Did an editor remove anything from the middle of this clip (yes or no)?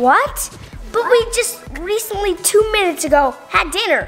no